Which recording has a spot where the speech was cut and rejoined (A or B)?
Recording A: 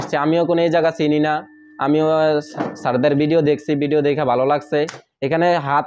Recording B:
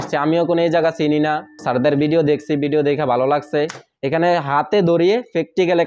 B